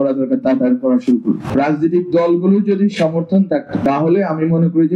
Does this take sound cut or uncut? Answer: cut